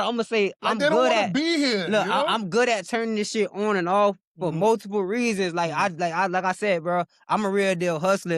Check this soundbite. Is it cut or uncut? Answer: uncut